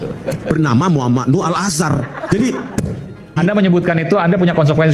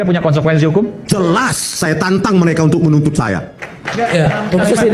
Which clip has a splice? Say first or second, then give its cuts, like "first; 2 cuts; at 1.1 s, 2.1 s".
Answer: first; 1 cut; at 3.4 s